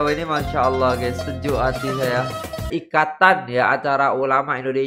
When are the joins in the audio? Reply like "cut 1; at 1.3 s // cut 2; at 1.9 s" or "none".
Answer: cut 1; at 2.7 s